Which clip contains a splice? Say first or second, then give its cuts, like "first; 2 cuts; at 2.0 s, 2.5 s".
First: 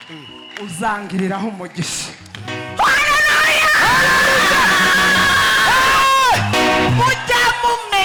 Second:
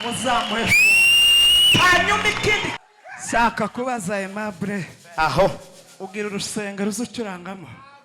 second; 1 cut; at 2.7 s